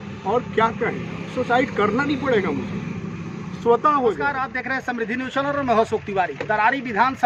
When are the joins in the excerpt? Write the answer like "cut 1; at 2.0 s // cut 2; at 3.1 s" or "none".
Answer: cut 1; at 4.6 s